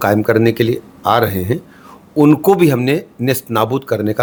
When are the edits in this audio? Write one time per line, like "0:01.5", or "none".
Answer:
none